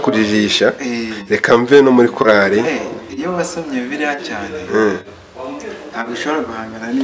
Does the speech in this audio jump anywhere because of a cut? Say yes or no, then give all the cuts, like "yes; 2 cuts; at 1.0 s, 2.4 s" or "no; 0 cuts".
no; 0 cuts